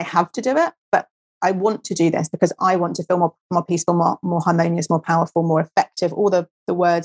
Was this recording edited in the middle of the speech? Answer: no; 0 cuts

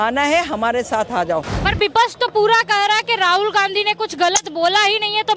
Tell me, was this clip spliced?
yes; 1 cut; at 1.6 s

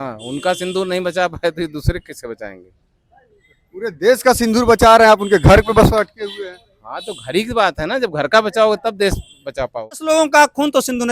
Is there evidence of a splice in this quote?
yes; 1 cut; at 10.0 s

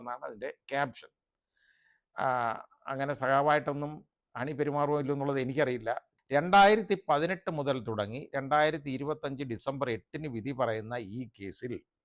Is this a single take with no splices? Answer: no; 1 cut; at 6.1 s

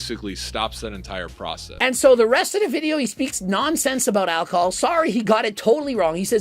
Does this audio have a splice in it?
yes; 1 cut; at 1.7 s

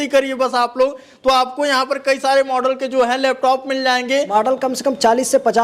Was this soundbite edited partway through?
yes; 1 cut; at 4.3 s

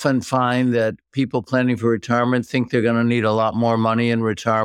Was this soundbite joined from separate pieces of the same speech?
no; 0 cuts

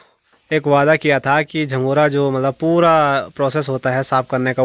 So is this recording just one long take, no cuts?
yes; 0 cuts

